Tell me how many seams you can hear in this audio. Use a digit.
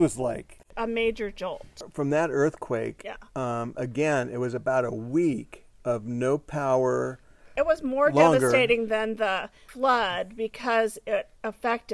2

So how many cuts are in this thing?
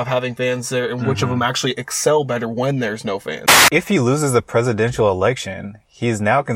1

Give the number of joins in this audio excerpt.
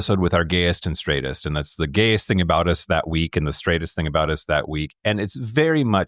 0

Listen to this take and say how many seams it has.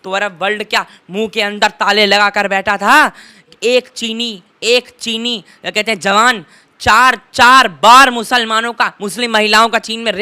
1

